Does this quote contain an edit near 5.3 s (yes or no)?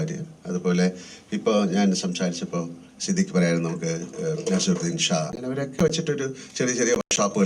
yes